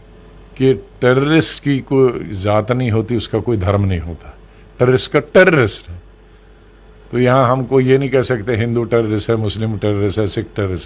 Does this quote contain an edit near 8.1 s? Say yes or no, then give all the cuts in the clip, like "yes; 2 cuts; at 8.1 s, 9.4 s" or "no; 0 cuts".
no; 0 cuts